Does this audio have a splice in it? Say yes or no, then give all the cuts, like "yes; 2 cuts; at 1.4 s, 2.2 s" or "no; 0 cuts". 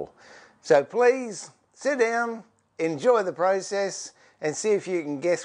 yes; 1 cut; at 0.9 s